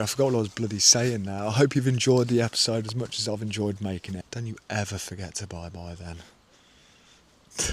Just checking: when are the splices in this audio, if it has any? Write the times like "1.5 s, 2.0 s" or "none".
4.3 s